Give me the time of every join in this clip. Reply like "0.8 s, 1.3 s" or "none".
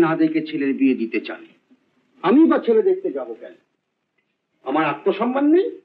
none